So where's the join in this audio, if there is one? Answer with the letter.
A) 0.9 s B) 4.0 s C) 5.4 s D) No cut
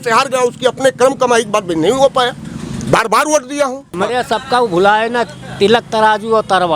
B